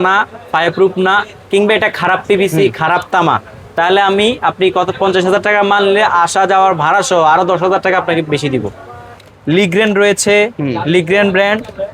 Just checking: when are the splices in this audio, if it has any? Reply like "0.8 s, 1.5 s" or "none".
9.3 s